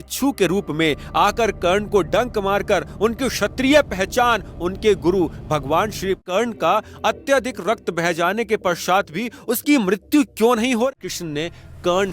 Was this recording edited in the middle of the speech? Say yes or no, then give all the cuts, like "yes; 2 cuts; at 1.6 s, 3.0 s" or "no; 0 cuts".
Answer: yes; 2 cuts; at 6.2 s, 11.0 s